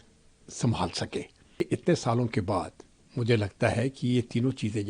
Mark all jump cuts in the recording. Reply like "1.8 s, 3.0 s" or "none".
1.6 s